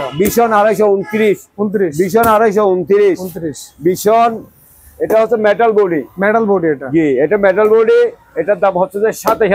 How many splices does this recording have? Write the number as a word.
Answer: zero